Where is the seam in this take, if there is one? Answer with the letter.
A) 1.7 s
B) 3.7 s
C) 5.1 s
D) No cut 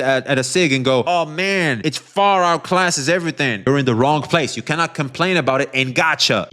B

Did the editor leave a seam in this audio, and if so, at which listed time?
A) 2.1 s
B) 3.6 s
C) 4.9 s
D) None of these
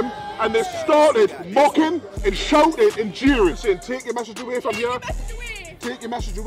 B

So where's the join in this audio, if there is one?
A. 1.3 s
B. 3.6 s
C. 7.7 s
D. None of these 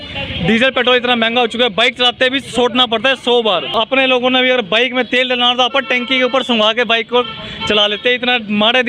B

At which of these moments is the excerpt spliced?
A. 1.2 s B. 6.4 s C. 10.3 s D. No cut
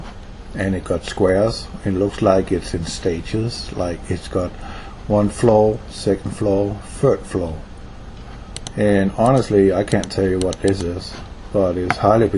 C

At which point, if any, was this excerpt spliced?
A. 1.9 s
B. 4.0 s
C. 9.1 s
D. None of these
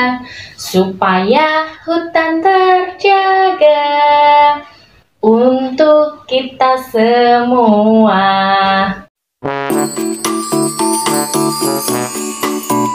C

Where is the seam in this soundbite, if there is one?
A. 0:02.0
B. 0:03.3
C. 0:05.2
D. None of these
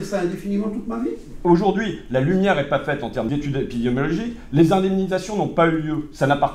B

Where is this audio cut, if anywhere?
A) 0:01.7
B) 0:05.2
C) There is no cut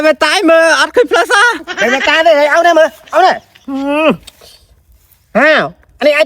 A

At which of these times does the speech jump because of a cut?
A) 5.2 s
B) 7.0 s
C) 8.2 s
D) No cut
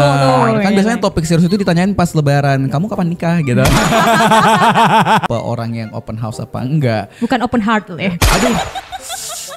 A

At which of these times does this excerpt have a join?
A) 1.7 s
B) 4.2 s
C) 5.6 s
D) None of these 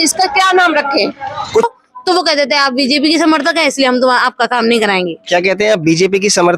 A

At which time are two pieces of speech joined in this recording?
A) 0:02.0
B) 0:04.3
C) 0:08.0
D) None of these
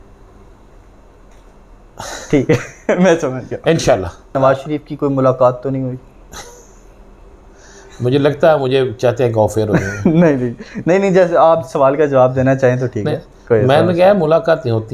B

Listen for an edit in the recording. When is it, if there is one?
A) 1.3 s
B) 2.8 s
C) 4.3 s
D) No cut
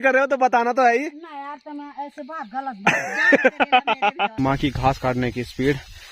C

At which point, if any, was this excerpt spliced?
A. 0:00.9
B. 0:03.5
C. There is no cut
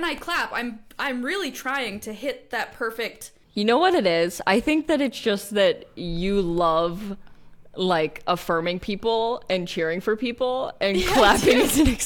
B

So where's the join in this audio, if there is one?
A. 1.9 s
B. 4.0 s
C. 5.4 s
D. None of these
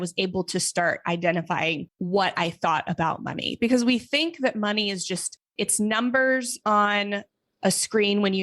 A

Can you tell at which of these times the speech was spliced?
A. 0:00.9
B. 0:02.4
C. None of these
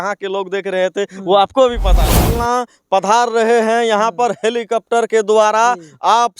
B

